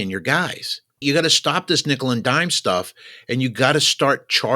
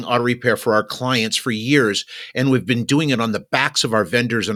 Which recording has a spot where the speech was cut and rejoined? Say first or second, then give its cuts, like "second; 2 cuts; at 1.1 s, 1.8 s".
first; 1 cut; at 1.0 s